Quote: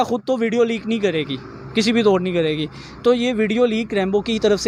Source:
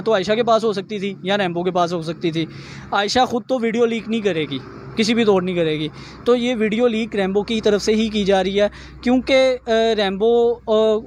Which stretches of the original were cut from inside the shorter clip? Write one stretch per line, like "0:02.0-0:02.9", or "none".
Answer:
none